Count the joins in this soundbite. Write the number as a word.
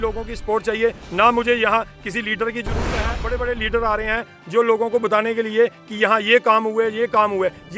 one